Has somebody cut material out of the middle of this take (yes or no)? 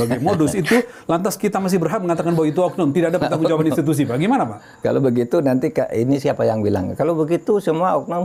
no